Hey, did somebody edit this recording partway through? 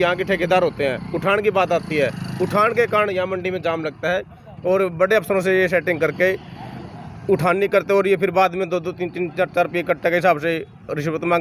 no; 0 cuts

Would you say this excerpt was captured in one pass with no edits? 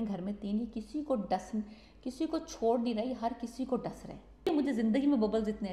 no; 1 cut; at 4.5 s

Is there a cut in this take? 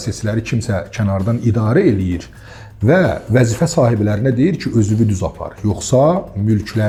no; 0 cuts

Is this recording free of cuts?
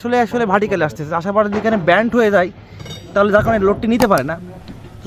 yes; 0 cuts

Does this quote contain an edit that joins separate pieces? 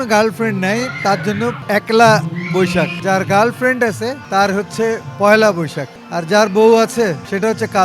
yes; 3 cuts; at 1.6 s, 3.0 s, 4.2 s

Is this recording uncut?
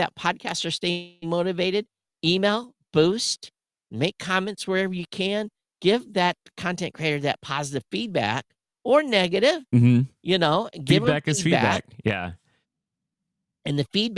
yes; 0 cuts

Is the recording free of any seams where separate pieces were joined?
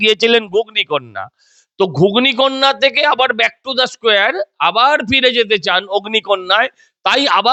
yes; 0 cuts

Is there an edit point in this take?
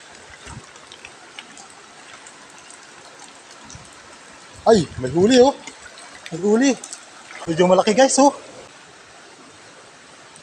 yes; 2 cuts; at 7.3 s, 8.7 s

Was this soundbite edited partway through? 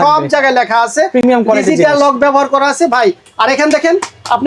no; 0 cuts

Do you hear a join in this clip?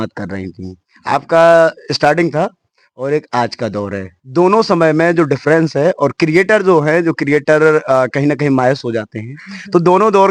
no; 0 cuts

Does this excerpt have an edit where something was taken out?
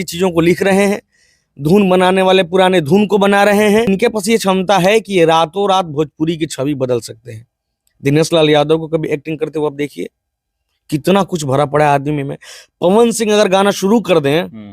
yes; 1 cut; at 3.9 s

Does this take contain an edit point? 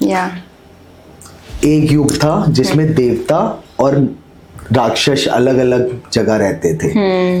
no; 0 cuts

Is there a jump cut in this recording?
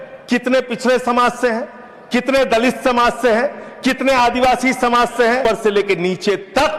yes; 1 cut; at 5.4 s

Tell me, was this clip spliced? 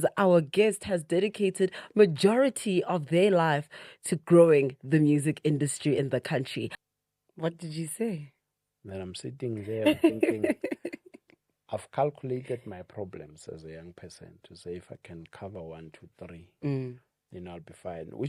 yes; 1 cut; at 6.8 s

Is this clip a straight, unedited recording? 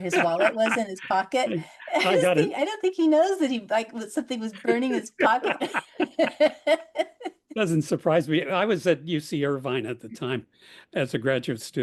yes; 0 cuts

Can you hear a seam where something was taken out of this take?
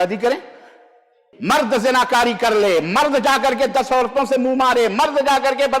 yes; 1 cut; at 1.3 s

